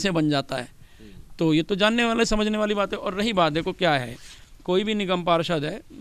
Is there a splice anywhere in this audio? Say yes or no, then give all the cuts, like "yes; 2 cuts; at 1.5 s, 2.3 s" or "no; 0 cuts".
no; 0 cuts